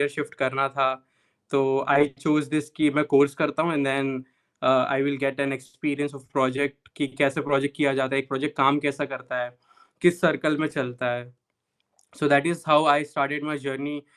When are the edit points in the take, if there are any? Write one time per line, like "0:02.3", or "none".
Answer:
none